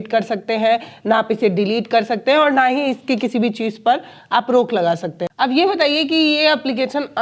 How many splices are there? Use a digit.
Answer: 1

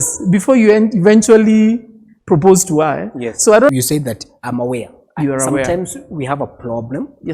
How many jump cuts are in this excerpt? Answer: 1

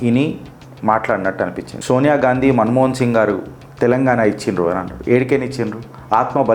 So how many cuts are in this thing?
1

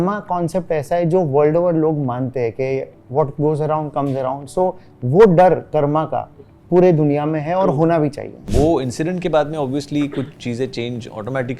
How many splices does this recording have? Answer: 1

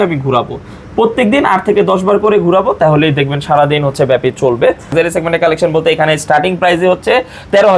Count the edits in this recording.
1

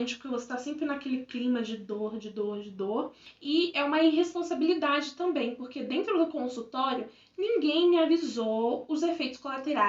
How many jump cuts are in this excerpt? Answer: 1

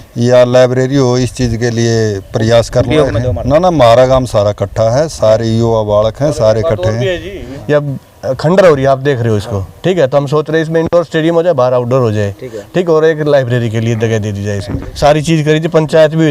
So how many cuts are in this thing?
3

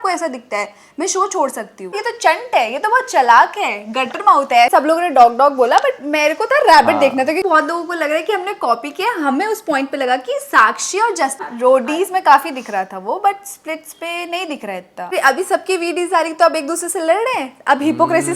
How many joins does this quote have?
5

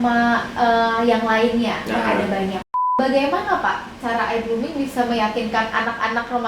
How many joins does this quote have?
1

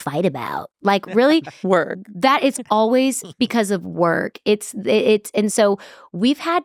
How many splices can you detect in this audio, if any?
0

